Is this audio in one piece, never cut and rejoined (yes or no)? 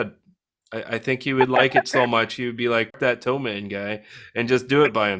no